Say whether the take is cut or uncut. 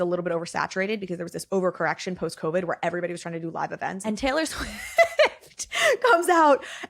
cut